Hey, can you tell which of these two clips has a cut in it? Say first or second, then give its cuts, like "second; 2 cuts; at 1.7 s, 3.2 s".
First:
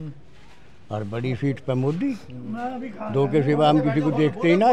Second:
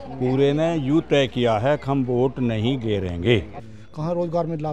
second; 1 cut; at 3.5 s